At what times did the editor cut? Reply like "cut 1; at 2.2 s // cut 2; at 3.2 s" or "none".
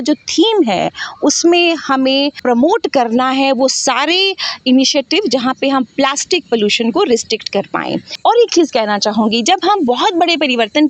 cut 1; at 8.0 s